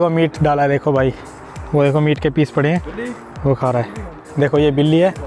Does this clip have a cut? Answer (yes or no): yes